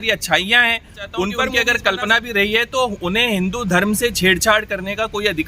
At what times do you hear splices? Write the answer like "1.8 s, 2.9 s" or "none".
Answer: 1.4 s